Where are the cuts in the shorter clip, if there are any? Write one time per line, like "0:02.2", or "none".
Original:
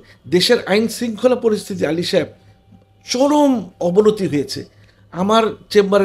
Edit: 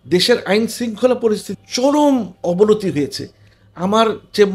0:01.5